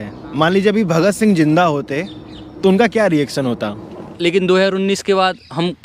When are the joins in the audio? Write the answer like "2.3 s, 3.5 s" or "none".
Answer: 4.1 s

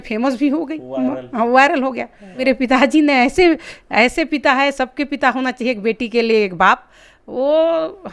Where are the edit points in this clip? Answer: 2.4 s

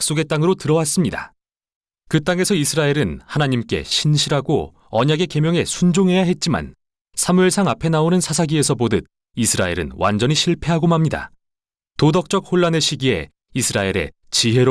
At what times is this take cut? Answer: 12.7 s

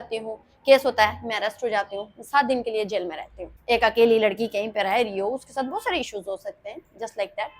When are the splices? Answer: 3.5 s

